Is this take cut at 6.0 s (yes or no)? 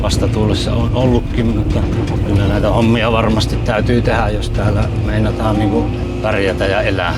yes